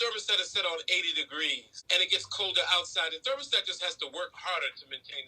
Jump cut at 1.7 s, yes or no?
yes